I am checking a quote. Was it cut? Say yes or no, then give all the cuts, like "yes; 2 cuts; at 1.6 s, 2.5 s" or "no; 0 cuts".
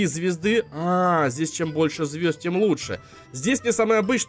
no; 0 cuts